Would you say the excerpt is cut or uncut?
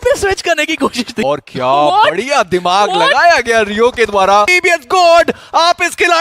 cut